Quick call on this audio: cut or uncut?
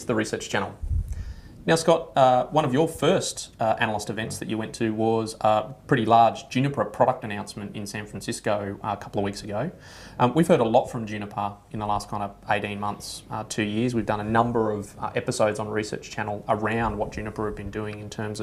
cut